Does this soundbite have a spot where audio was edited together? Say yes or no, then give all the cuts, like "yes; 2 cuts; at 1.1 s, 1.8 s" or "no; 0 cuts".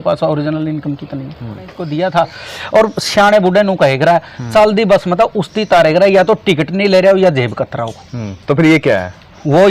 yes; 1 cut; at 1.8 s